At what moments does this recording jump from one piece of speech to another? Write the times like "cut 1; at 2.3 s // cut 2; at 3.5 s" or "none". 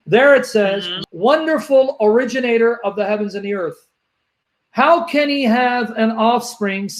cut 1; at 0.9 s